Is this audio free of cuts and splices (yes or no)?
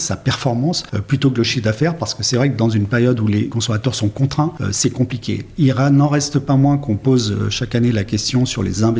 no